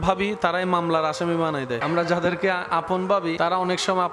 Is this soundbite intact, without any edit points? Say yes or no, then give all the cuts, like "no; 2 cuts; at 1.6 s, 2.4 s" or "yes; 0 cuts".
yes; 0 cuts